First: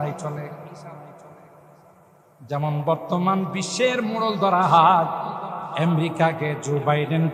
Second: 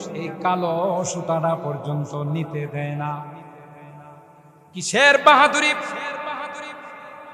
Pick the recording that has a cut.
second; 1 cut; at 4.0 s

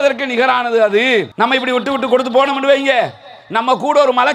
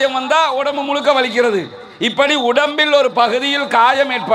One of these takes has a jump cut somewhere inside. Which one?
first; 1 cut; at 1.3 s

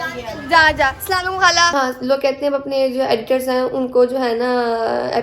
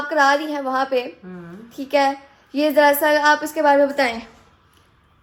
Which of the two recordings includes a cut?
first; 1 cut; at 1.7 s

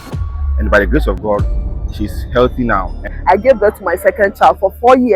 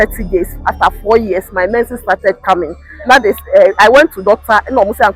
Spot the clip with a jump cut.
first; 1 cut; at 3.1 s

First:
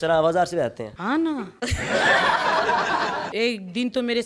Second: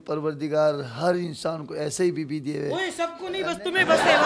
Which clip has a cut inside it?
first; 3 cuts; at 0.9 s, 1.5 s, 3.3 s

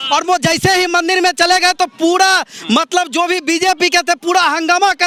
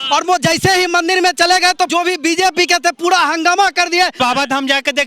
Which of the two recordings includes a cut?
second; 2 cuts; at 1.9 s, 4.1 s

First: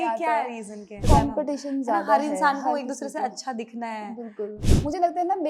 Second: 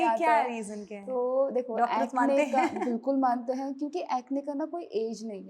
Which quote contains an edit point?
first; 2 cuts; at 1.0 s, 4.6 s

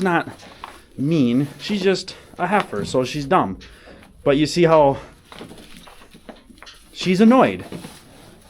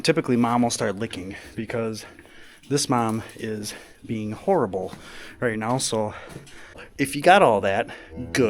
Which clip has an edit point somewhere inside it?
second; 1 cut; at 6.8 s

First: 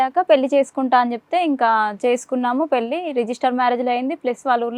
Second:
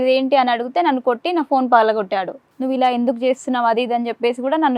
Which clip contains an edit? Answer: second; 1 cut; at 2.4 s

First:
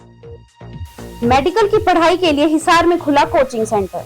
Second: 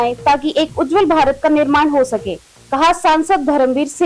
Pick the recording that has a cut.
first; 1 cut; at 1.2 s

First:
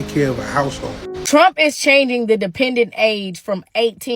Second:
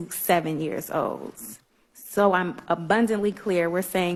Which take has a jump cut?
first; 1 cut; at 1.2 s

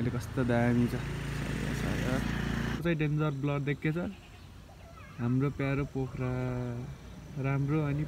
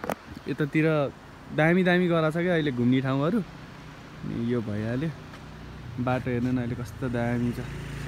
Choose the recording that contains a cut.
first; 1 cut; at 2.8 s

